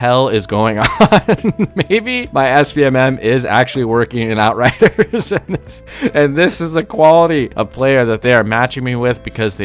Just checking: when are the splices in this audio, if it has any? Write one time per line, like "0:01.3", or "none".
0:02.2
0:07.6